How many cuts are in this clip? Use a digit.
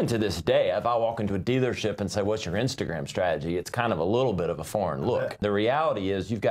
1